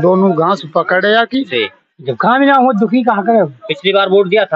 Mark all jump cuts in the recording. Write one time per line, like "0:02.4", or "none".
0:01.5